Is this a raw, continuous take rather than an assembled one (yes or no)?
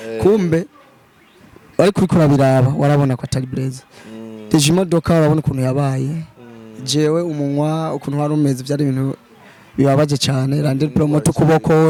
yes